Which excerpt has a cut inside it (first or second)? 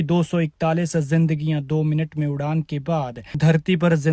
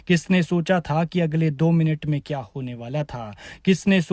first